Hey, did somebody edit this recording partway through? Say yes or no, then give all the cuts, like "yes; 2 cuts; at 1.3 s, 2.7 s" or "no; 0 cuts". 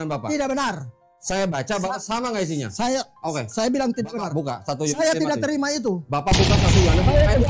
no; 0 cuts